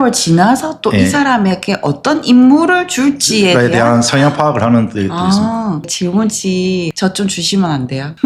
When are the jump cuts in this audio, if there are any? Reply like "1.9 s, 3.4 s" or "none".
6.9 s